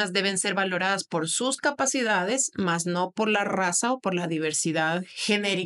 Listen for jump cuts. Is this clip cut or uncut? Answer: uncut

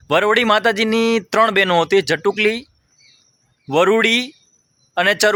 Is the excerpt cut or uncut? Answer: uncut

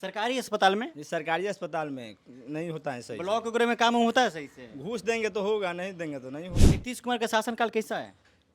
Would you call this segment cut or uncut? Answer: cut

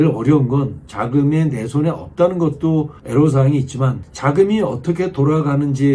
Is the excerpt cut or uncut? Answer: cut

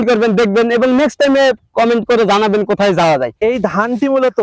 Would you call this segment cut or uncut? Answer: cut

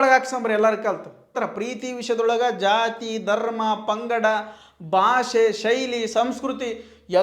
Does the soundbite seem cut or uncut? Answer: cut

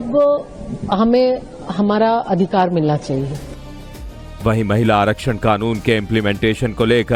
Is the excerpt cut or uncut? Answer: uncut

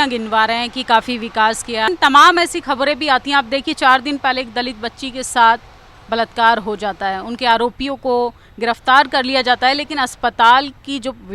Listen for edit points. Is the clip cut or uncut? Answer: cut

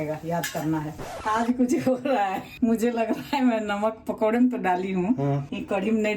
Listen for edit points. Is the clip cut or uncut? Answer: cut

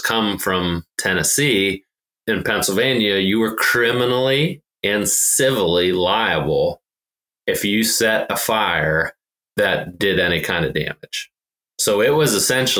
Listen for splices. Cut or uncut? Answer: cut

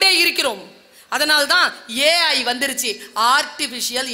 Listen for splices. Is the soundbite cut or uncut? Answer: uncut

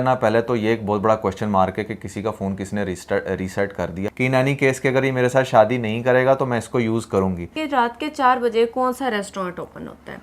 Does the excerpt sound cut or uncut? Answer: cut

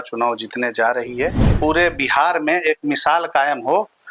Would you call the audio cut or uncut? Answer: cut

